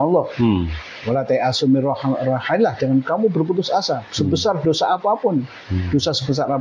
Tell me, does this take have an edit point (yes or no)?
no